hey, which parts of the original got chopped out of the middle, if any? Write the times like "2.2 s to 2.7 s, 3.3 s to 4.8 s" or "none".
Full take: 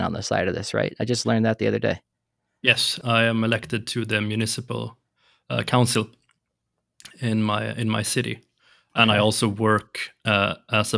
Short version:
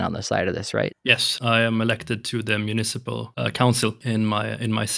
1.0 s to 2.6 s, 4.9 s to 5.4 s, 6.1 s to 7.2 s